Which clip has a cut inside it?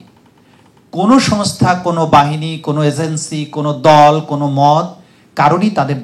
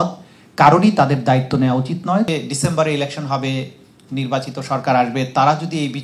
second; 1 cut; at 2.3 s

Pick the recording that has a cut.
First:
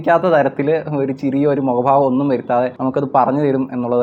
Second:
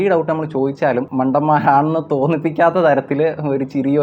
second; 1 cut; at 1.1 s

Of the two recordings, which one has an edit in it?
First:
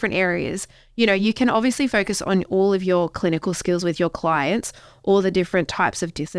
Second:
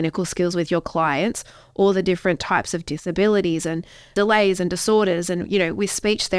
second; 1 cut; at 4.1 s

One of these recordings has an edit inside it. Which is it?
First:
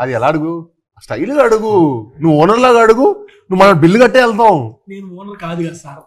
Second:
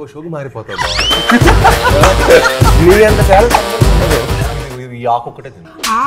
second; 1 cut; at 4.4 s

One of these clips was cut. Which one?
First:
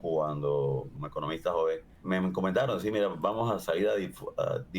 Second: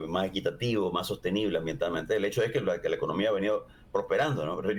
first; 2 cuts; at 1.0 s, 1.9 s

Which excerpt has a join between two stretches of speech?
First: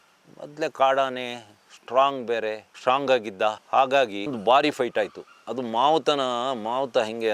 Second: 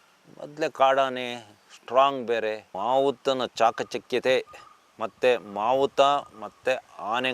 second; 1 cut; at 2.7 s

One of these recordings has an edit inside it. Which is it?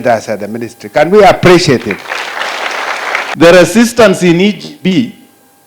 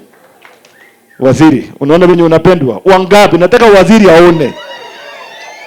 first; 1 cut; at 3.3 s

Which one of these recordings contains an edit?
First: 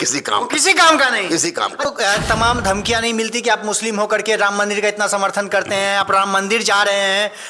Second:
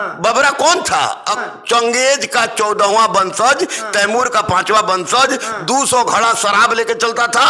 first; 1 cut; at 1.9 s

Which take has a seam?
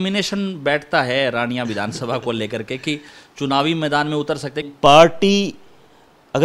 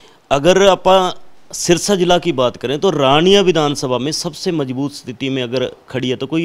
first; 1 cut; at 4.6 s

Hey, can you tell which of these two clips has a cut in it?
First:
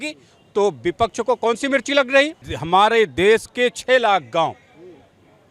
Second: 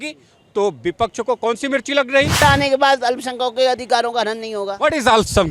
second; 1 cut; at 2.4 s

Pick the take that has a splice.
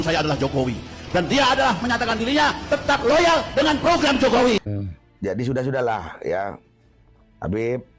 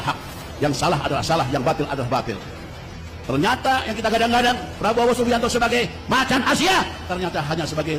first; 1 cut; at 4.7 s

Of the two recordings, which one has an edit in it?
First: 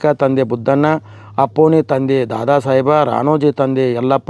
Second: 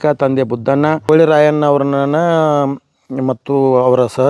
second; 1 cut; at 1.0 s

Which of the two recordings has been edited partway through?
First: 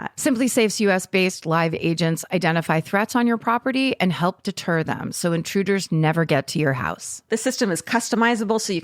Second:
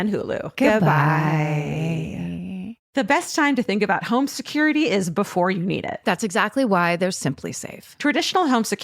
second; 1 cut; at 2.8 s

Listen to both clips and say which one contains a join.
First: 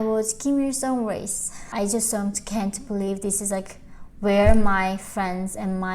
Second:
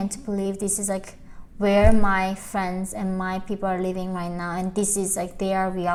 first; 1 cut; at 1.7 s

